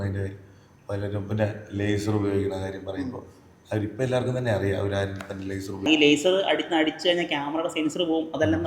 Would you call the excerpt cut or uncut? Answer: uncut